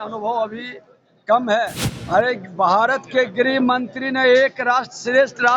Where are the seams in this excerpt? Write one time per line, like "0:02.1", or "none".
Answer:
0:01.9